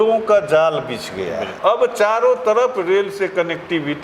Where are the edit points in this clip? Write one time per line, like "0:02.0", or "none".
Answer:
0:01.5